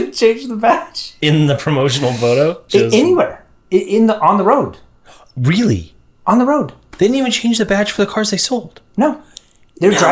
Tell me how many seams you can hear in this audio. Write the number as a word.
two